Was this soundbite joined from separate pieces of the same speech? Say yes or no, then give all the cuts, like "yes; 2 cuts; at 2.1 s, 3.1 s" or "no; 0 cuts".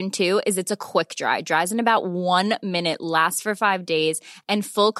no; 0 cuts